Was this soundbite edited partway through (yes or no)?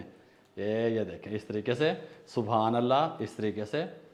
no